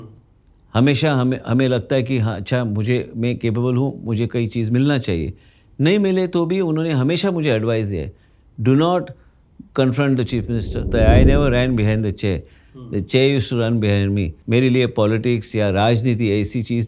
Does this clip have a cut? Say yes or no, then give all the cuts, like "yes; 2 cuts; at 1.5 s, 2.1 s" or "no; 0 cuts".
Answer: yes; 2 cuts; at 10.9 s, 14.3 s